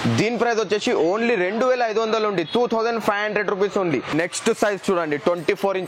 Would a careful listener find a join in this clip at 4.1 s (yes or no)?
yes